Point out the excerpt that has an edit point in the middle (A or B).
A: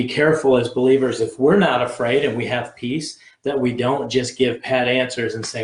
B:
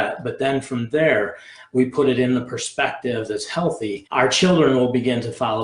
B